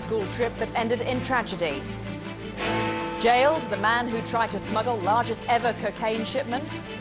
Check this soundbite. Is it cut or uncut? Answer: uncut